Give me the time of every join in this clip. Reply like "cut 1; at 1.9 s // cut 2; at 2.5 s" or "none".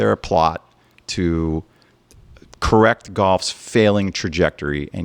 none